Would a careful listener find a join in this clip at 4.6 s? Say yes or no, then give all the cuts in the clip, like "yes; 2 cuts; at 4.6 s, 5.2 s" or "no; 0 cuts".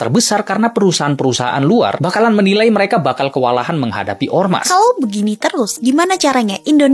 no; 0 cuts